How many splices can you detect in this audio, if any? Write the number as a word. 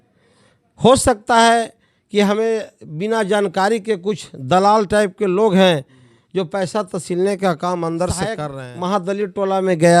one